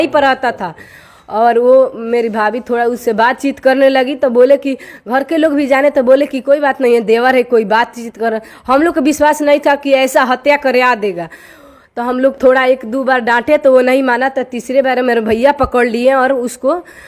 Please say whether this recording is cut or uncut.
uncut